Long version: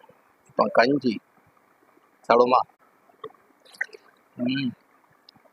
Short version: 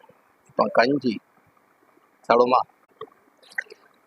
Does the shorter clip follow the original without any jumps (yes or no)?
no